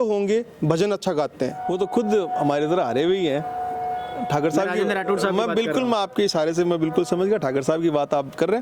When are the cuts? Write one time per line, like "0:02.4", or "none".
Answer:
0:01.7